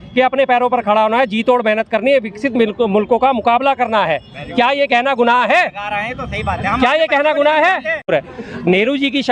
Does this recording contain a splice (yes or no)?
yes